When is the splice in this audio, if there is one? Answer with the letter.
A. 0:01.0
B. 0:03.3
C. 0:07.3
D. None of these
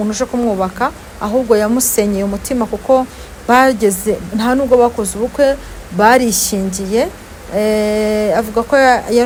D